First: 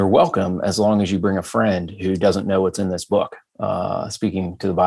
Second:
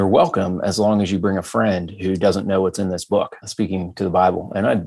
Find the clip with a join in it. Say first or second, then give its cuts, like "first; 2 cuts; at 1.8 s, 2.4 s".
second; 1 cut; at 3.5 s